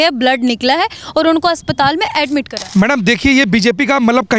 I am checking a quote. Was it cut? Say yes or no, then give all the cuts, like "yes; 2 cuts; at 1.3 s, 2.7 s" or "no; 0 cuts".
yes; 1 cut; at 2.6 s